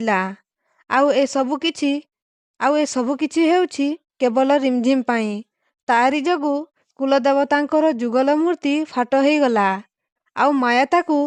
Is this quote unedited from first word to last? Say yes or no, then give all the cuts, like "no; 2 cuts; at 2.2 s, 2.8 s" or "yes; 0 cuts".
yes; 0 cuts